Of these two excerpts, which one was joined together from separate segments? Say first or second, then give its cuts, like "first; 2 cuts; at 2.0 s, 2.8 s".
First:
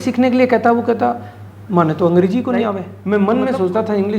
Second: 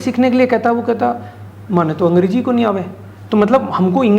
first; 1 cut; at 2.9 s